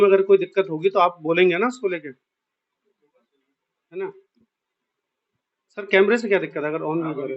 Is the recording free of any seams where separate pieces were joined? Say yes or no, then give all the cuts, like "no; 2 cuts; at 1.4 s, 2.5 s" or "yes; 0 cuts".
yes; 0 cuts